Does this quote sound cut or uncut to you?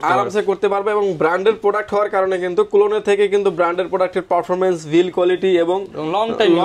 uncut